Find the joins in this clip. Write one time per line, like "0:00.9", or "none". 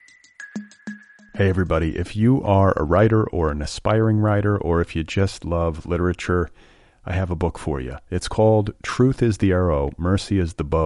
0:00.9